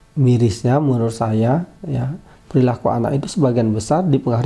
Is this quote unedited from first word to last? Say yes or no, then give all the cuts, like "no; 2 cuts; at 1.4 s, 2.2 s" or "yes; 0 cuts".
yes; 0 cuts